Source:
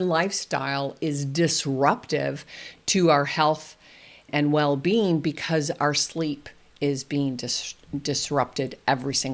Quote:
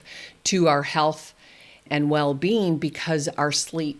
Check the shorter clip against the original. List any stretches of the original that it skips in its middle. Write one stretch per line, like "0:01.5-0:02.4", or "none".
none